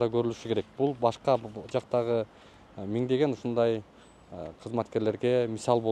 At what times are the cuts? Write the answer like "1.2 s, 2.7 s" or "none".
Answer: none